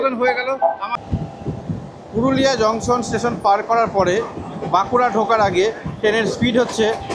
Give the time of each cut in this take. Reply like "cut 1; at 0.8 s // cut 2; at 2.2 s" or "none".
cut 1; at 0.9 s